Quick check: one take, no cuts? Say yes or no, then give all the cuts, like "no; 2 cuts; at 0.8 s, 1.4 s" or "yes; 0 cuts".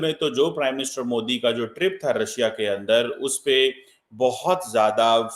yes; 0 cuts